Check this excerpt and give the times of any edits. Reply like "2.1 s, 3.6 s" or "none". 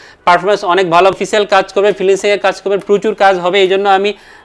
1.1 s